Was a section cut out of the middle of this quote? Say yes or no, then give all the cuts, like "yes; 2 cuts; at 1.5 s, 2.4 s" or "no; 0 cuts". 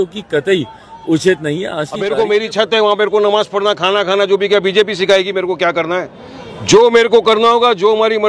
yes; 1 cut; at 2.1 s